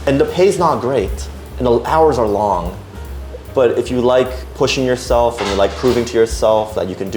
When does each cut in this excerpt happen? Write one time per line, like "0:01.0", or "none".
none